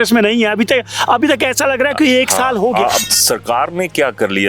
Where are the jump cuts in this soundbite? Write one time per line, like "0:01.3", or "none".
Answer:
0:03.0